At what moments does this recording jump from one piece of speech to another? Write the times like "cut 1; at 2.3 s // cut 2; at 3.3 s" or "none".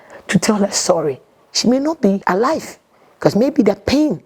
cut 1; at 2.2 s